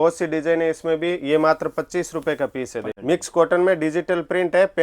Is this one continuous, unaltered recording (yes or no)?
no